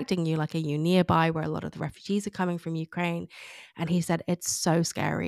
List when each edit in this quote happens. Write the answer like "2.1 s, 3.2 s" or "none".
none

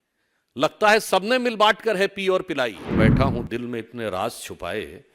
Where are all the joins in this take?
2.9 s

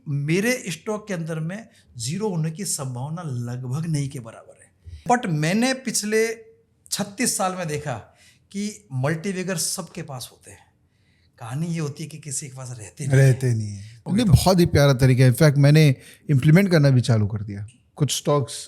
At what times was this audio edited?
5.0 s, 14.0 s

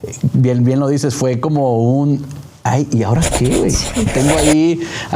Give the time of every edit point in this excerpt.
4.1 s

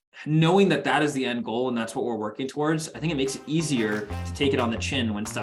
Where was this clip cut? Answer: none

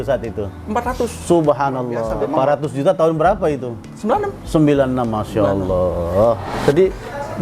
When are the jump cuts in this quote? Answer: 2.0 s, 6.5 s

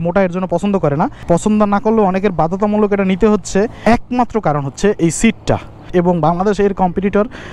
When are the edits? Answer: 1.2 s, 3.8 s, 5.7 s

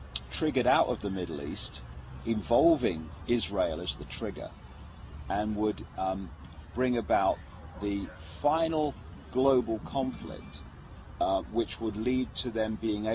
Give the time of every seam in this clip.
none

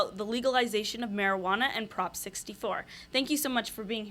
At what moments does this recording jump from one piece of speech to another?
none

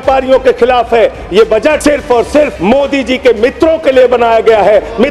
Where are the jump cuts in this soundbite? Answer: 1.8 s, 2.6 s

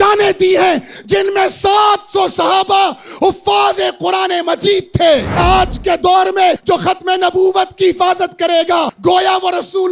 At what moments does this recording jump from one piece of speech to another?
5.4 s, 6.6 s, 8.9 s

